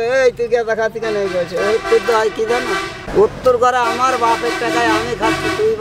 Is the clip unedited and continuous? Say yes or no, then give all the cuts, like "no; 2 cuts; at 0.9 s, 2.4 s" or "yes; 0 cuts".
no; 1 cut; at 3.0 s